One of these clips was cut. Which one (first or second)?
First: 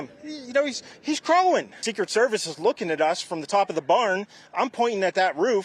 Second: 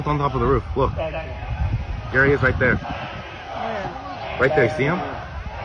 first